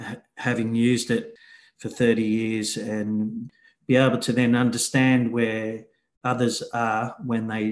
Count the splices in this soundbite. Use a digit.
2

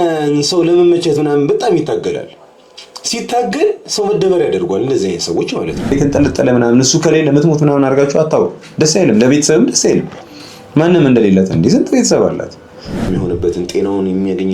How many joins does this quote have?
2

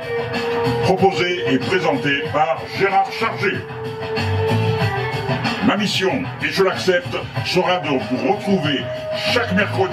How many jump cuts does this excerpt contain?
0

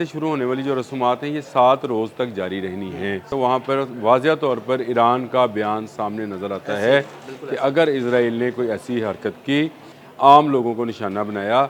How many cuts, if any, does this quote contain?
2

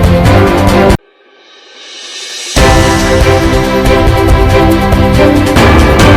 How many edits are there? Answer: 0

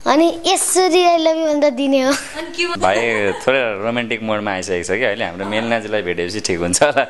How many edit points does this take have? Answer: 1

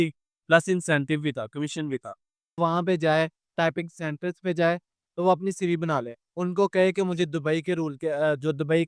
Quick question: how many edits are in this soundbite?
1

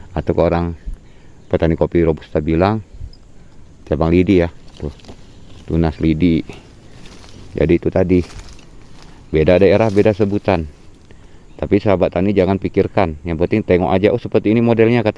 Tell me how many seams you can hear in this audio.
0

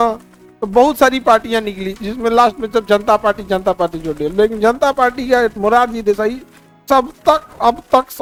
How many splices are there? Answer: 0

